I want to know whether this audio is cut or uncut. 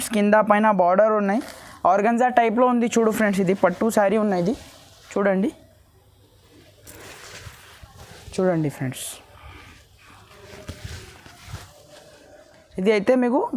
uncut